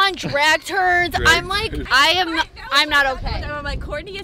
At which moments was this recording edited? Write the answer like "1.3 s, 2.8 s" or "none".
1.8 s